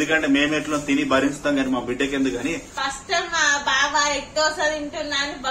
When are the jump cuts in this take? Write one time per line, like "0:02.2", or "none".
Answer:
0:02.7